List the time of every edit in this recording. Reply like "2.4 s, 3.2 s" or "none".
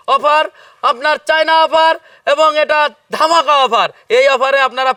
none